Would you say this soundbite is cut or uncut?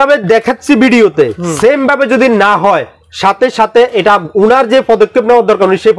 uncut